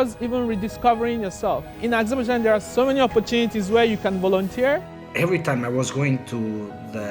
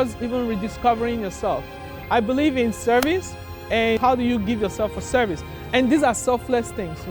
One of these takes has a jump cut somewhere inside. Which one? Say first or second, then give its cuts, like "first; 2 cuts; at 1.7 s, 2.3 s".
first; 2 cuts; at 1.8 s, 4.9 s